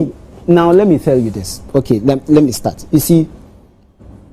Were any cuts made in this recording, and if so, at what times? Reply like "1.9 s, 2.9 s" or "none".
none

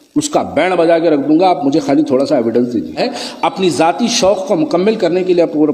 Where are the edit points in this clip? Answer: 3.0 s

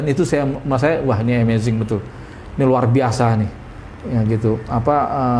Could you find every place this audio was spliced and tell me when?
none

